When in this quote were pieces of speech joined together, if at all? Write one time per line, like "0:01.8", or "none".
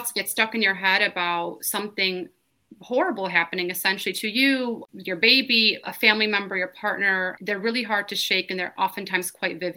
0:04.8
0:05.8
0:07.4